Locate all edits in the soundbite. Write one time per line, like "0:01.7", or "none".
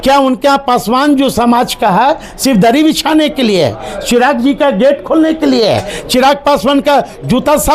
none